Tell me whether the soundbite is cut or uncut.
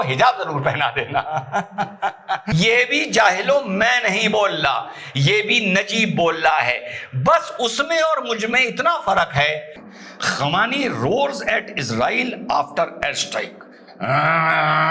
cut